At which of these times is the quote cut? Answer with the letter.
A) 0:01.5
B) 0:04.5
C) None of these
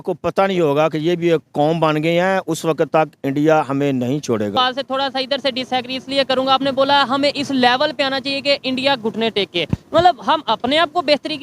B